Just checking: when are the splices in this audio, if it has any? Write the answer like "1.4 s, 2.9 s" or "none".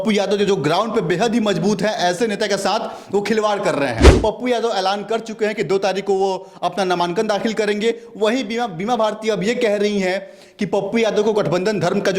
4.1 s